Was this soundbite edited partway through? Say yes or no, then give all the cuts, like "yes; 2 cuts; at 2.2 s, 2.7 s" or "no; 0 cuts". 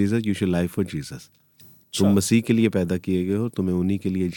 no; 0 cuts